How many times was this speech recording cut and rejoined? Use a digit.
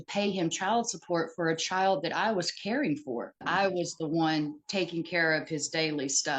1